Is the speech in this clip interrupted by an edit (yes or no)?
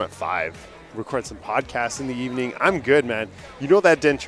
yes